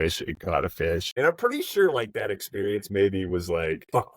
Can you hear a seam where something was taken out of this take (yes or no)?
yes